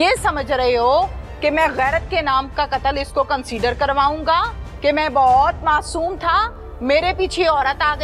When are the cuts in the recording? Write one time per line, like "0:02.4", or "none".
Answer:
none